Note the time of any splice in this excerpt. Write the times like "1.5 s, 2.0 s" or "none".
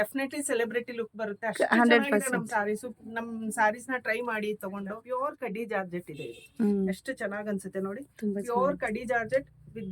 5.0 s